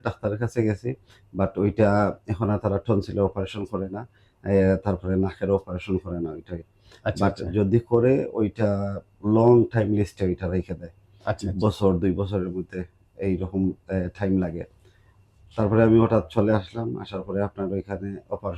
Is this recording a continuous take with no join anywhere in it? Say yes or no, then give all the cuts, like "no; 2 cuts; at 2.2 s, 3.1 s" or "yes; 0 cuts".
yes; 0 cuts